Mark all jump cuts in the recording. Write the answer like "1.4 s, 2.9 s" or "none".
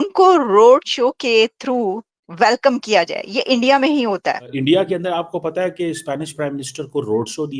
4.5 s